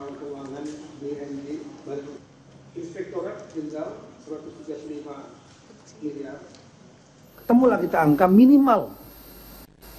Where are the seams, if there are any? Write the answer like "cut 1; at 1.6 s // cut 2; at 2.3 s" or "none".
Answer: cut 1; at 7.4 s